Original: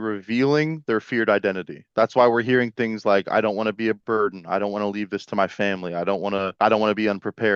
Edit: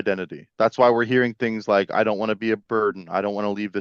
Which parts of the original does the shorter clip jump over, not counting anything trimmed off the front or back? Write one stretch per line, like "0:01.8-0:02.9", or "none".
none

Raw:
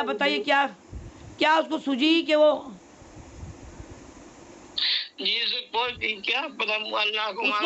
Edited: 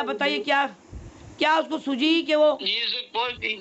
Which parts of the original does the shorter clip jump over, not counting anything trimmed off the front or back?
0:02.6-0:05.2

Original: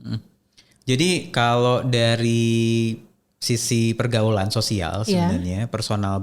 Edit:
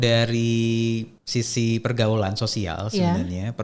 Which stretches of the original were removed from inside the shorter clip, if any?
0:03.1-0:03.3

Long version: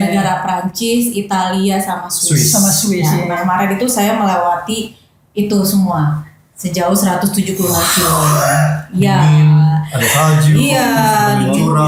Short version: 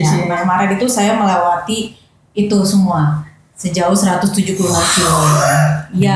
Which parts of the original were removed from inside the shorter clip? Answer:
none

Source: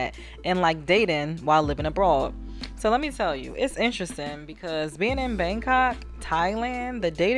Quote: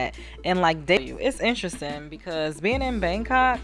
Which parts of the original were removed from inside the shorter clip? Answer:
0:01.0-0:03.3

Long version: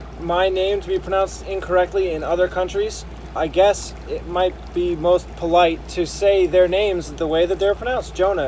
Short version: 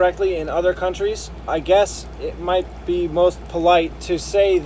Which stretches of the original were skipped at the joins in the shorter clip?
0:03.1-0:03.2

